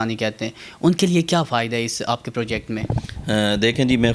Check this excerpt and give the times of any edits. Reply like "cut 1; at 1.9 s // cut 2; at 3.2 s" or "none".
none

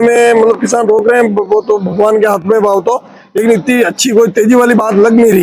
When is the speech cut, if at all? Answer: none

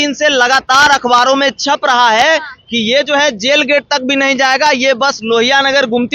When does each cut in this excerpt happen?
none

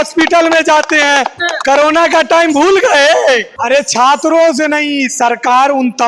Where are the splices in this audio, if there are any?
cut 1; at 3.5 s

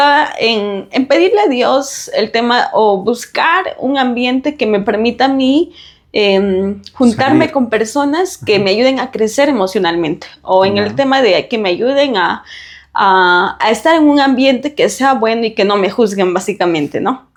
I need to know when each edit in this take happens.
none

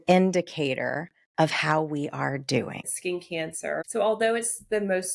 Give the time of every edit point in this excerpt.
cut 1; at 3.4 s

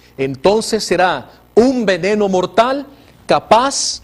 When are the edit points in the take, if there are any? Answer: cut 1; at 2.1 s

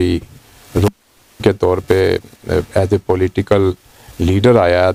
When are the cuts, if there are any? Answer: none

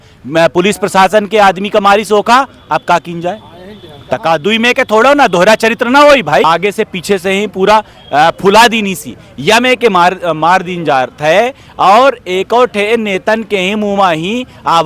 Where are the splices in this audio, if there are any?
cut 1; at 6.4 s

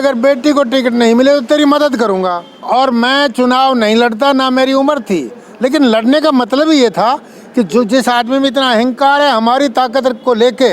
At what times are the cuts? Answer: cut 1; at 2.5 s

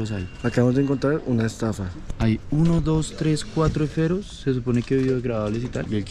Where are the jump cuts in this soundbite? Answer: none

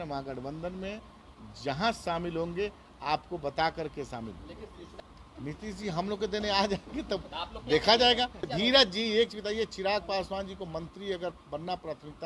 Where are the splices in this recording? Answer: cut 1; at 4.9 s // cut 2; at 8.5 s

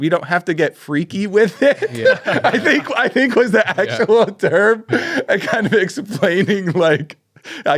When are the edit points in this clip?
none

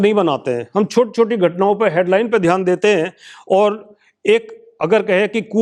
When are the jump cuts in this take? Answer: none

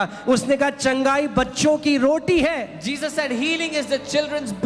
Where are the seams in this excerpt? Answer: none

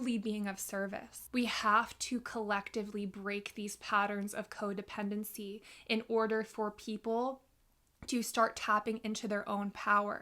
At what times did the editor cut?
cut 1; at 1.1 s

